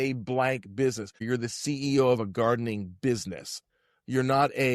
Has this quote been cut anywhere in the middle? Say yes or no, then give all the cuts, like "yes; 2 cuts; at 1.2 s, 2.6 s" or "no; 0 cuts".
yes; 1 cut; at 1.2 s